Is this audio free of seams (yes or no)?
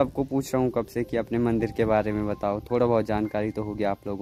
yes